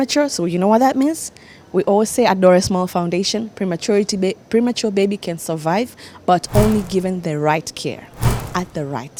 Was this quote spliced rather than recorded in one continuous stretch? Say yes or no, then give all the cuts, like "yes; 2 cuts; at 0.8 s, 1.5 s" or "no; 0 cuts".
no; 0 cuts